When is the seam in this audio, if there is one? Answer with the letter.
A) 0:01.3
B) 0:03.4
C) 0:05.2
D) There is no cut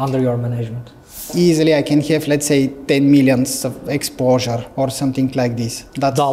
A